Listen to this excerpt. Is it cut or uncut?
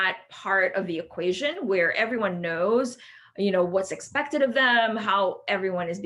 uncut